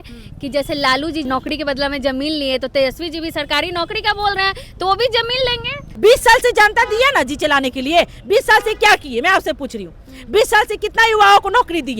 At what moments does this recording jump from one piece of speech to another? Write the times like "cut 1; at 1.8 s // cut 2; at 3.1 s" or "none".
cut 1; at 1.2 s // cut 2; at 5.8 s